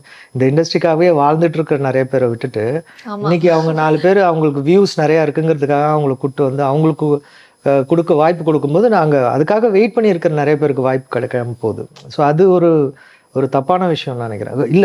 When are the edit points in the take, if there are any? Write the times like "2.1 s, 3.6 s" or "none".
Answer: none